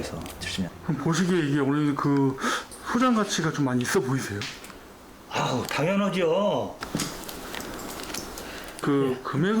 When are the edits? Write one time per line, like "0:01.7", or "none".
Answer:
0:06.8

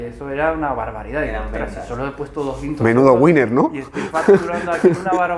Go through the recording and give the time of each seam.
none

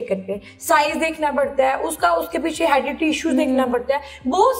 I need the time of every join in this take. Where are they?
none

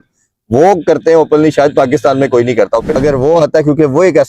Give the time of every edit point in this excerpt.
0:03.0

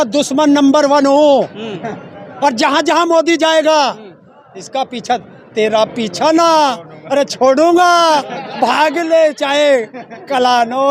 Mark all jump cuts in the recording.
none

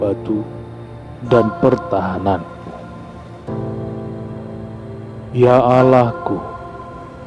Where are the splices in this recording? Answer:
0:02.9
0:04.7

